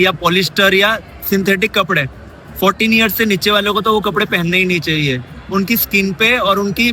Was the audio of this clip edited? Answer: no; 0 cuts

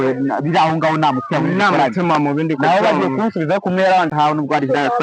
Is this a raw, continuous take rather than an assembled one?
no; 1 cut; at 4.1 s

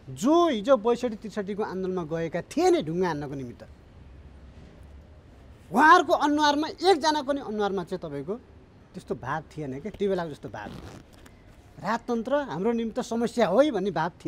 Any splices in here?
no; 0 cuts

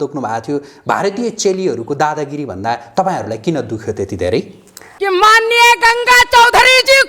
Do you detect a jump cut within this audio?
yes; 1 cut; at 4.8 s

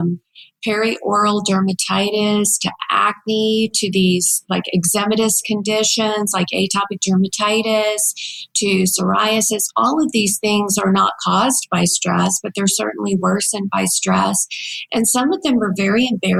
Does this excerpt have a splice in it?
no; 0 cuts

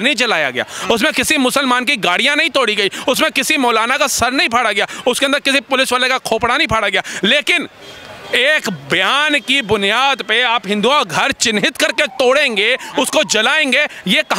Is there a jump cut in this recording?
no; 0 cuts

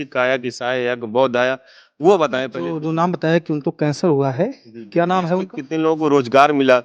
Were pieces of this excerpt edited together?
yes; 2 cuts; at 2.6 s, 5.6 s

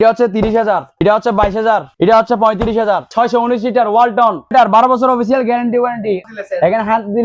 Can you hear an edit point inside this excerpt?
yes; 5 cuts; at 1.0 s, 1.9 s, 3.1 s, 4.5 s, 6.3 s

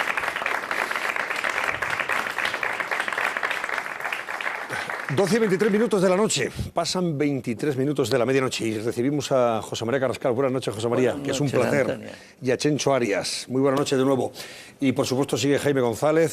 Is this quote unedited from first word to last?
yes; 0 cuts

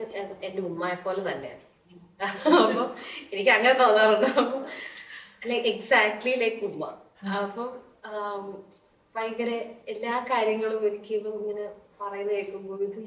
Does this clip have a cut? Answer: no; 0 cuts

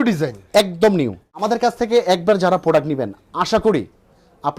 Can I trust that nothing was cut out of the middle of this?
no; 1 cut; at 1.4 s

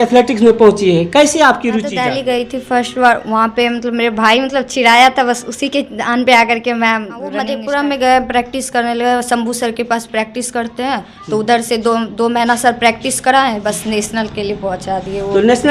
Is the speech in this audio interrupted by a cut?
yes; 2 cuts; at 1.9 s, 7.4 s

